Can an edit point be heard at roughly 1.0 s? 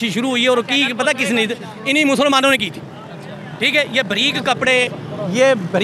no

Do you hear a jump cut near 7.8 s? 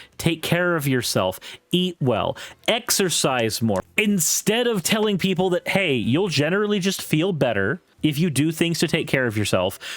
yes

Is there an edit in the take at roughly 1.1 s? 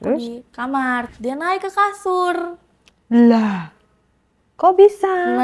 yes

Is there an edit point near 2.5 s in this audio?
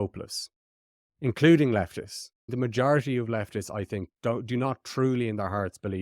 yes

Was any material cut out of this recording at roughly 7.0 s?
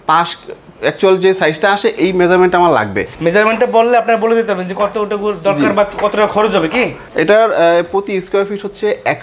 yes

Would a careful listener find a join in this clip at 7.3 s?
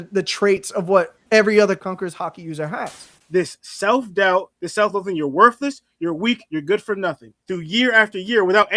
no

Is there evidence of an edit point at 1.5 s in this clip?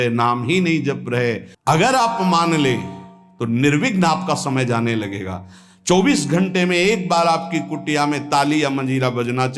yes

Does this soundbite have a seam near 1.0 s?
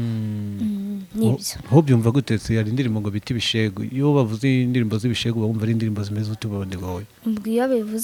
no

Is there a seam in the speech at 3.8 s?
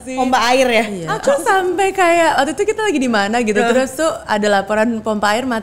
no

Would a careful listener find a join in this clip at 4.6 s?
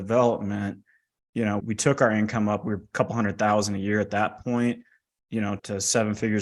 no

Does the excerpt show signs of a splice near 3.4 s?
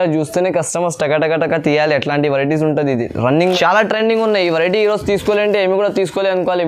yes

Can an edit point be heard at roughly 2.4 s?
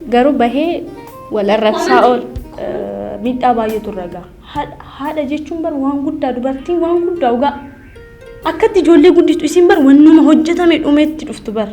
yes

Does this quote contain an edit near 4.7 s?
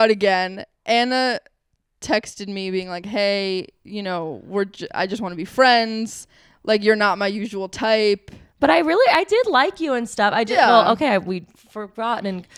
no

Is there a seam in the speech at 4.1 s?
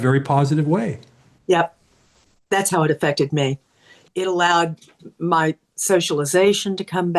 yes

